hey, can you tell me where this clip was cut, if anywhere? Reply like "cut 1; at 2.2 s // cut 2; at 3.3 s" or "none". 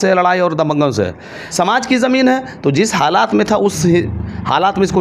cut 1; at 1.4 s